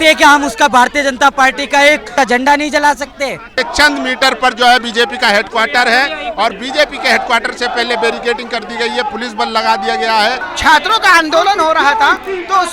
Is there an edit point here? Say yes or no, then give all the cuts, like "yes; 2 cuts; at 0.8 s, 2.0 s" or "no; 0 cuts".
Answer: yes; 3 cuts; at 2.1 s, 3.6 s, 10.5 s